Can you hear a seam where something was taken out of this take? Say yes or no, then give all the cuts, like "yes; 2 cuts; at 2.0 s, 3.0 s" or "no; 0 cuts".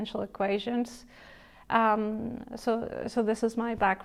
no; 0 cuts